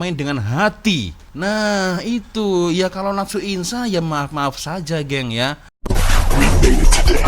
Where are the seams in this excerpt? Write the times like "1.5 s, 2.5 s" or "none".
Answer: 5.7 s